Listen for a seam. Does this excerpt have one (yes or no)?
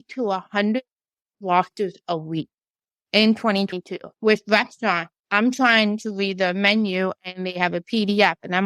yes